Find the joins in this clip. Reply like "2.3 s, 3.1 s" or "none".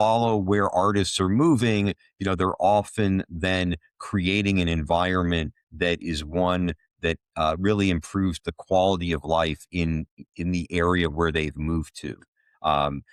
none